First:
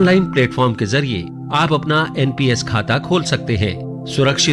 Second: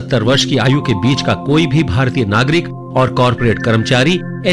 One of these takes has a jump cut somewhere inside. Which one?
second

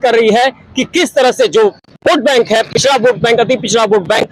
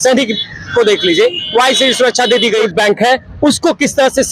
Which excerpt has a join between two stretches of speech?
second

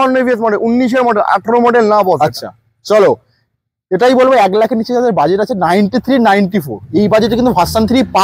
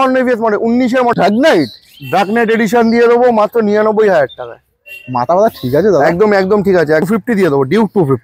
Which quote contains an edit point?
second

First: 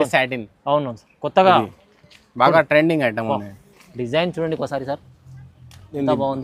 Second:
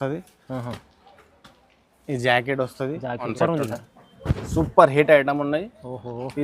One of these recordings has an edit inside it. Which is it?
second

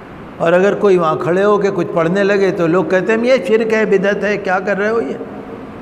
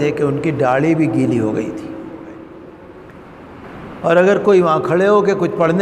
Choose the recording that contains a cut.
second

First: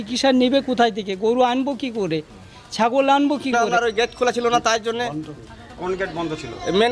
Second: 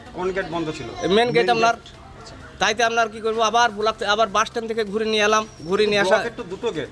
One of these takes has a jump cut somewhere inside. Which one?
first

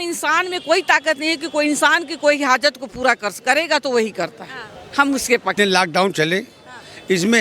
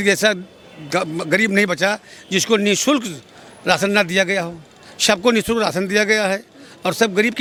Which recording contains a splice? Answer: first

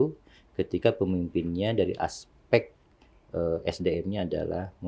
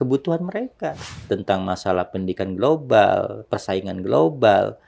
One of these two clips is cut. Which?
second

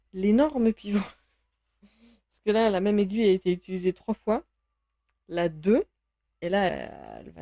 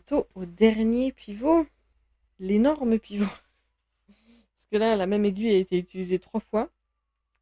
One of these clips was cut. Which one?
first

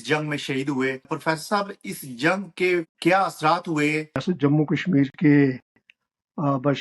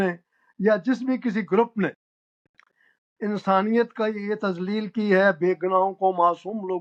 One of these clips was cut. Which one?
first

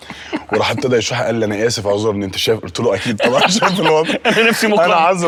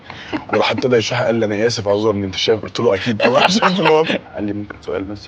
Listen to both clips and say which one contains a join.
second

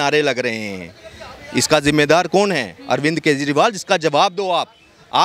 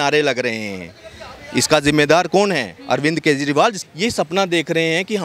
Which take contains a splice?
second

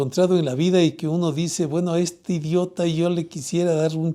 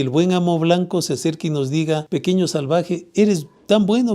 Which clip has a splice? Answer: second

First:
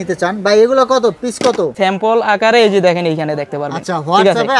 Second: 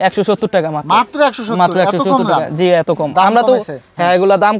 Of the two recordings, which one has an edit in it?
first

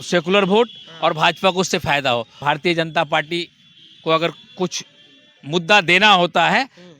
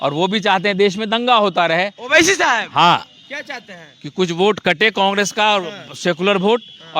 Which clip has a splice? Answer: first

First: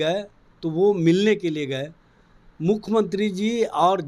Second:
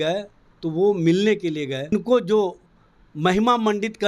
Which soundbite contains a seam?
second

